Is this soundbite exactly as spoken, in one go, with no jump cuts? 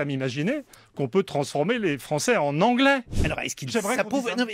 no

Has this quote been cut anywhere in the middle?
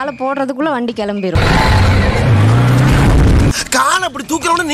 no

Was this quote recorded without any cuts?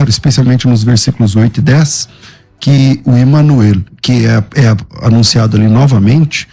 yes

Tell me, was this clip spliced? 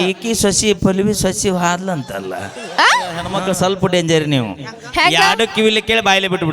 yes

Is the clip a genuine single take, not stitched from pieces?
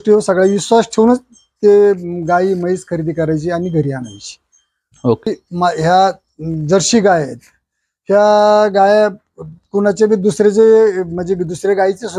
no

